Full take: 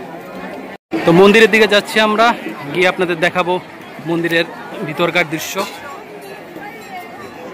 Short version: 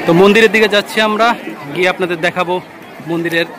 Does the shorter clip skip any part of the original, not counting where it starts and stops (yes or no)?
no